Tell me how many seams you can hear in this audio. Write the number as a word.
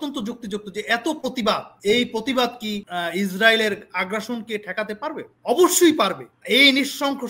four